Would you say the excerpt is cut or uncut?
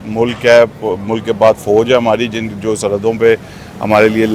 uncut